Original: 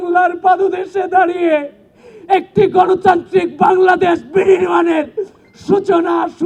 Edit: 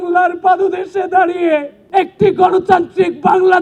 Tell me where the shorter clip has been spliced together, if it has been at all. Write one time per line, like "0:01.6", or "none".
0:01.8